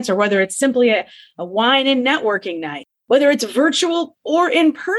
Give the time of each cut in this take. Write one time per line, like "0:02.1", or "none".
none